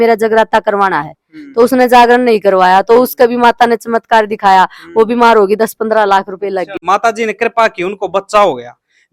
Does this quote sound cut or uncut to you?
uncut